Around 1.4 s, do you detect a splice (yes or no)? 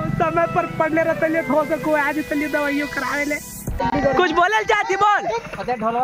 no